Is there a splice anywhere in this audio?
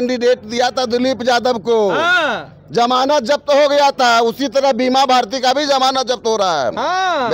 no; 0 cuts

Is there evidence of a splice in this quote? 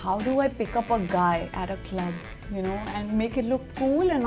no; 0 cuts

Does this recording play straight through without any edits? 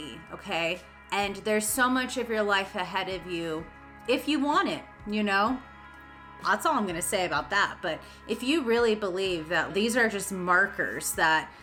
yes; 0 cuts

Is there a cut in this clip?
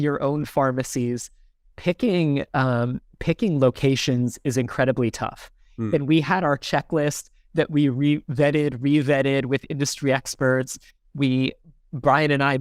no; 0 cuts

